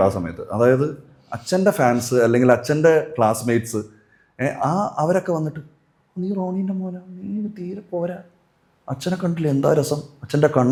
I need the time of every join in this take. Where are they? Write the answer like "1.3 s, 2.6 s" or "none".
none